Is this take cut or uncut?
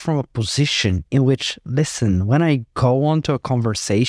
uncut